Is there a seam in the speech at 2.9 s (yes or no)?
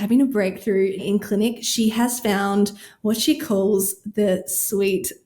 no